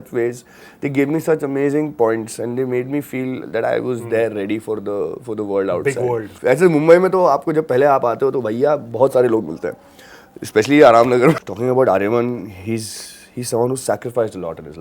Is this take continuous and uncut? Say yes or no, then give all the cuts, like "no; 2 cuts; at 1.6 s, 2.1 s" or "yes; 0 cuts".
no; 2 cuts; at 6.3 s, 11.4 s